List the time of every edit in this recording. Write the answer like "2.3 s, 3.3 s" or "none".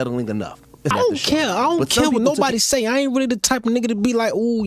0.9 s